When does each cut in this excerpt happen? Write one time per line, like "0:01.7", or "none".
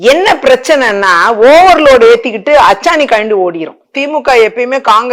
0:03.9